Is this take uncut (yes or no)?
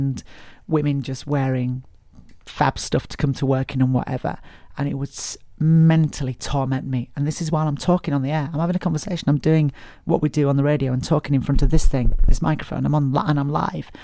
yes